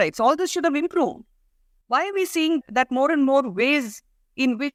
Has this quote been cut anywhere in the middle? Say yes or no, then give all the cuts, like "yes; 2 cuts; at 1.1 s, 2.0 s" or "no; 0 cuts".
no; 0 cuts